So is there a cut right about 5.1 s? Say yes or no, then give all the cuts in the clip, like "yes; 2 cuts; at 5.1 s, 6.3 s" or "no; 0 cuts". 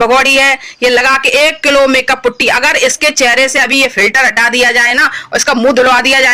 no; 0 cuts